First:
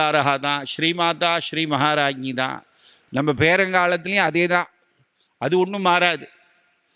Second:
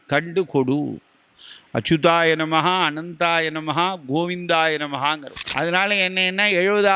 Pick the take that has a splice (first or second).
second